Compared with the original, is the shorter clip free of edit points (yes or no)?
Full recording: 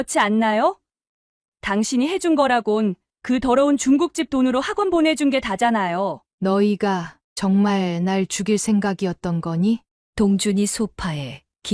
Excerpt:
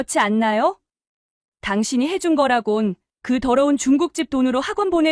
yes